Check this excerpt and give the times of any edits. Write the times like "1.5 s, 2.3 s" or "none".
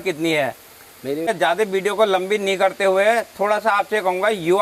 1.3 s